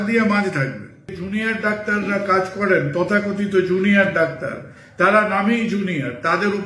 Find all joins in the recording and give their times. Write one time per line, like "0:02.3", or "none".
0:01.2